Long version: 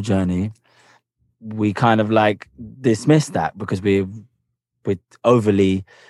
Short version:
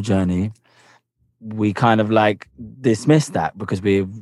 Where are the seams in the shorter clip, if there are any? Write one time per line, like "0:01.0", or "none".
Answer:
none